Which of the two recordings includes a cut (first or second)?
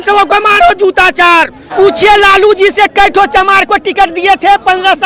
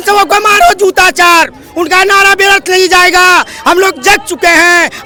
first